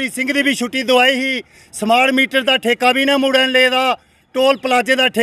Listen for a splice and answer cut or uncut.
uncut